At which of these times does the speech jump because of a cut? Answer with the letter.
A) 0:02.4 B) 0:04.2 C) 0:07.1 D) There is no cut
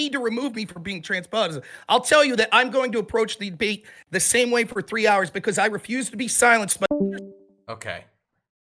C